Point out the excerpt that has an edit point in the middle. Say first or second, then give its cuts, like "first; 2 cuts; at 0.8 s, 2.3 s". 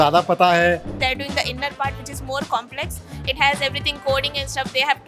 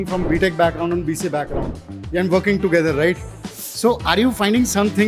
first; 1 cut; at 0.9 s